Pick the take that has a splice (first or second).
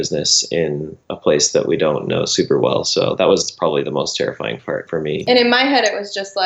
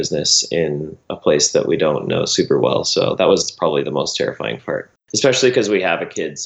first